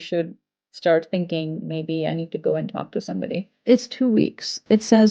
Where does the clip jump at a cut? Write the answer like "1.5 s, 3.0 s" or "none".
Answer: 3.6 s